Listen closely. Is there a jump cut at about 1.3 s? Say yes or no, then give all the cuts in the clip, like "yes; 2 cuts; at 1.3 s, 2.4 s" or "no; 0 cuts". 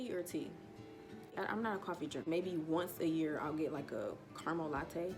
yes; 2 cuts; at 1.3 s, 2.2 s